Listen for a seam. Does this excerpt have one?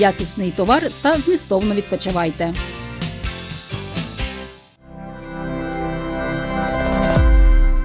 yes; 1 cut; at 4.5 s

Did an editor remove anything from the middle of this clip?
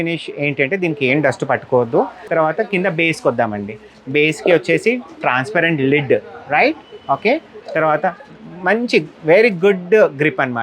yes; 1 cut; at 2.2 s

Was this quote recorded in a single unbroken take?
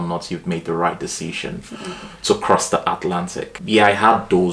yes; 0 cuts

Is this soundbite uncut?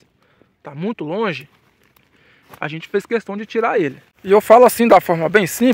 no; 1 cut; at 4.1 s

